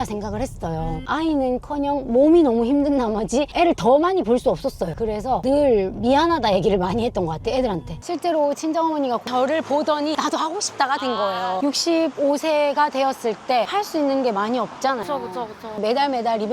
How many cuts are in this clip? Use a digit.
5